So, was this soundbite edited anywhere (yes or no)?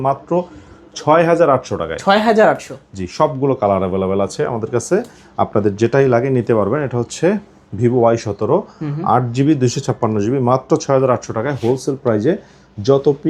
no